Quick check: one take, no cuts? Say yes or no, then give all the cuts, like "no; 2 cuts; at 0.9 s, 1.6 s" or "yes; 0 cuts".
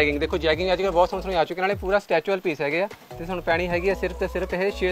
yes; 0 cuts